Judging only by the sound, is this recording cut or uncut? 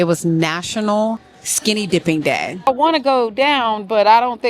cut